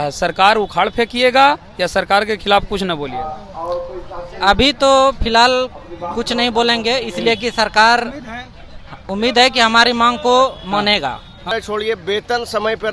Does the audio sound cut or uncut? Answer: cut